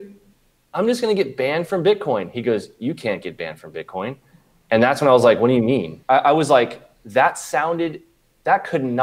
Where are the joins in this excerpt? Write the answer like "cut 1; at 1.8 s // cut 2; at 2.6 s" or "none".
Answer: cut 1; at 5.9 s